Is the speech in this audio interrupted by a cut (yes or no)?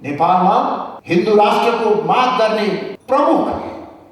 yes